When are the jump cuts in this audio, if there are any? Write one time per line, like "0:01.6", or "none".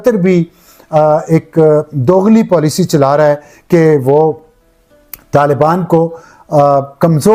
none